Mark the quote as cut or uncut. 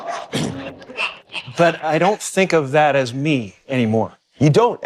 uncut